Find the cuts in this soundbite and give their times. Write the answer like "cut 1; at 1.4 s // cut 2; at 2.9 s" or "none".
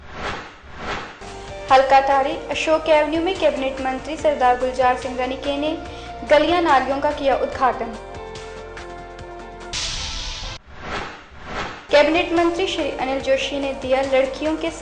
cut 1; at 0.9 s